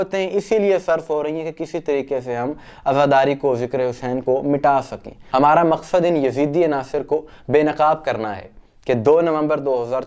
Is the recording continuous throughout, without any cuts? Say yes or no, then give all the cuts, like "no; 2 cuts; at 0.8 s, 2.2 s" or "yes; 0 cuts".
yes; 0 cuts